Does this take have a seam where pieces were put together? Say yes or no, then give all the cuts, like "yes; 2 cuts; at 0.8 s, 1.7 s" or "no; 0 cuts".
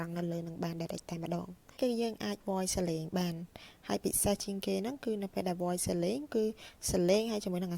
yes; 1 cut; at 1.8 s